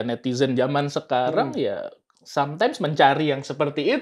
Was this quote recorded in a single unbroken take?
yes; 0 cuts

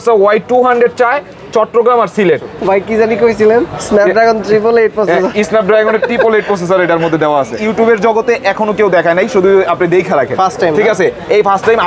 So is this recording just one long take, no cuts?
no; 2 cuts; at 2.5 s, 7.6 s

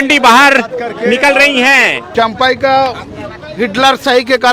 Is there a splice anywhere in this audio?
yes; 1 cut; at 2.0 s

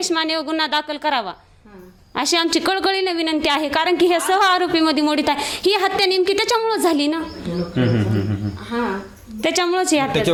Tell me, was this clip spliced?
no; 0 cuts

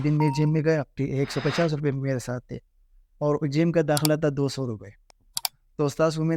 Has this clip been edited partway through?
yes; 1 cut; at 0.9 s

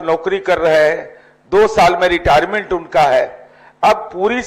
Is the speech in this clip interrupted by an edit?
no; 0 cuts

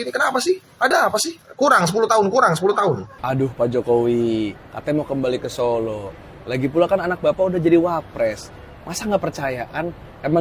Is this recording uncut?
no; 2 cuts; at 1.4 s, 3.1 s

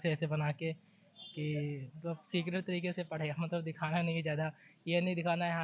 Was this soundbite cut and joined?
no; 0 cuts

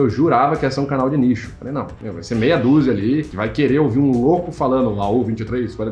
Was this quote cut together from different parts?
no; 0 cuts

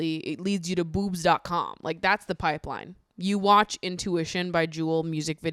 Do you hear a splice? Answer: no; 0 cuts

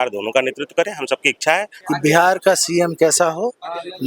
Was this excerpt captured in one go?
no; 1 cut; at 1.8 s

